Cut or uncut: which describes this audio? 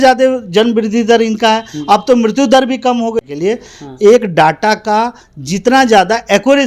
uncut